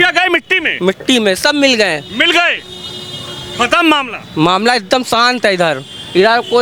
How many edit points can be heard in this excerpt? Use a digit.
0